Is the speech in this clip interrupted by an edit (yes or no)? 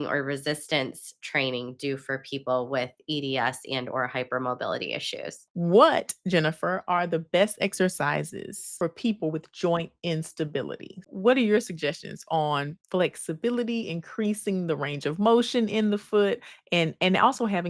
yes